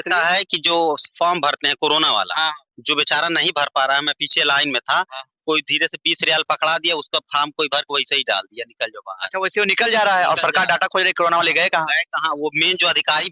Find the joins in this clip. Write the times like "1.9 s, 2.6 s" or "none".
none